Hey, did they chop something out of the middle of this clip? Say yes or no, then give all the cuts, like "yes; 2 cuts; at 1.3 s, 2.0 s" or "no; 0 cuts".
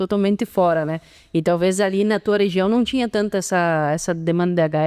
no; 0 cuts